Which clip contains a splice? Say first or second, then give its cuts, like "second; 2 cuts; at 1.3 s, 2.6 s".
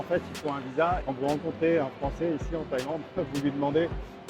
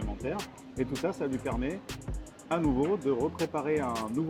first; 1 cut; at 1.0 s